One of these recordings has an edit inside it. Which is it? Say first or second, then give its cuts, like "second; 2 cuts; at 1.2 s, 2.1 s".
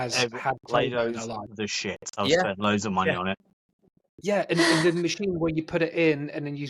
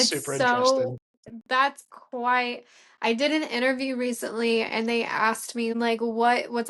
second; 1 cut; at 5.7 s